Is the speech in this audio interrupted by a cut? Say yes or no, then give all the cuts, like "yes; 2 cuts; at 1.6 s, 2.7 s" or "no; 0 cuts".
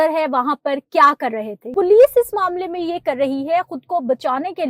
yes; 1 cut; at 1.5 s